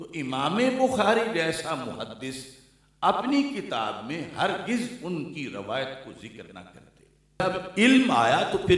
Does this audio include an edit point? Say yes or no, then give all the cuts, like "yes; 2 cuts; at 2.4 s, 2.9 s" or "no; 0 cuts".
yes; 1 cut; at 7.4 s